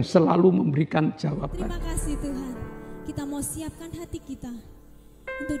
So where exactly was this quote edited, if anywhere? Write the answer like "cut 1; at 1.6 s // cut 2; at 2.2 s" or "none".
cut 1; at 1.8 s